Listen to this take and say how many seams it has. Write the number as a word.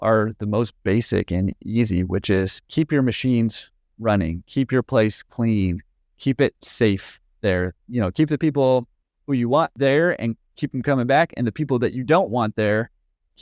two